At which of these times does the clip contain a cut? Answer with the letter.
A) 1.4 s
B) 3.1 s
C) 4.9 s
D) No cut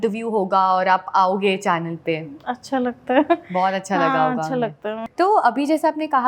C